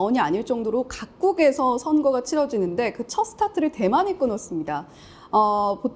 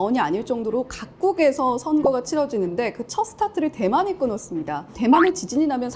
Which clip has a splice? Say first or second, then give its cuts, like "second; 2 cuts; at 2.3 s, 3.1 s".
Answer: second; 1 cut; at 5.0 s